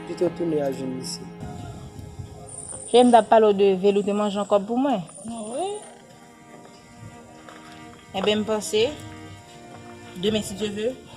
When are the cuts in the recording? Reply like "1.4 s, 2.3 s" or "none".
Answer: 1.5 s